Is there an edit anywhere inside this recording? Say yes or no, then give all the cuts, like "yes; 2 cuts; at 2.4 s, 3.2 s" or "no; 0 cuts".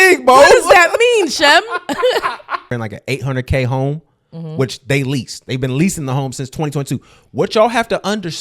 yes; 1 cut; at 2.7 s